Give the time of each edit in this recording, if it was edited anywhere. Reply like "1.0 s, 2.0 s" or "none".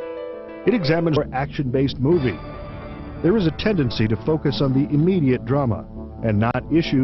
none